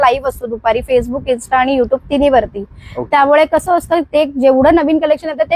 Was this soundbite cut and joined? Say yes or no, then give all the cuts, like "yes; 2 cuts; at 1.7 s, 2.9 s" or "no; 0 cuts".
no; 0 cuts